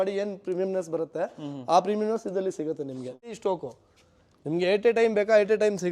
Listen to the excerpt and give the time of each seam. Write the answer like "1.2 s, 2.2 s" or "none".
3.4 s